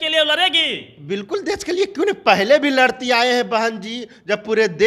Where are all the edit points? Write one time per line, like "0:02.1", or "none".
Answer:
none